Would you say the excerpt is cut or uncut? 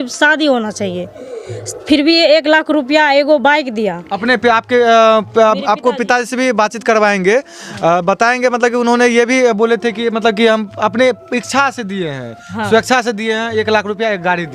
uncut